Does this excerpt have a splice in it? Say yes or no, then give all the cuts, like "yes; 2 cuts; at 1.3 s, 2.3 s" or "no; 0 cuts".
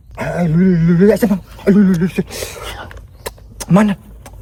no; 0 cuts